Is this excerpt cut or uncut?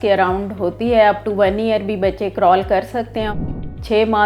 cut